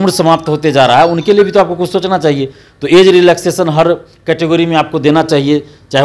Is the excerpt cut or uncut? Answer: uncut